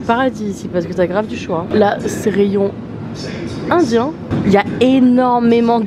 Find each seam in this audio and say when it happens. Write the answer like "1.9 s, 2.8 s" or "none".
none